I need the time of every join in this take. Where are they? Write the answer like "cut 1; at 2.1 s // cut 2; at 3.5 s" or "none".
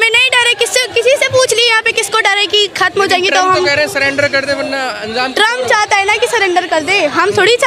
none